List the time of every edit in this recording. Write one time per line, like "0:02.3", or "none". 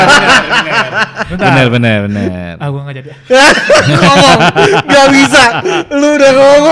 none